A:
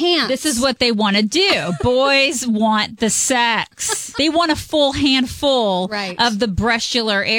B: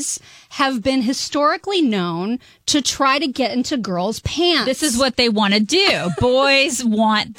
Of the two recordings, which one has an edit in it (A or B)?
A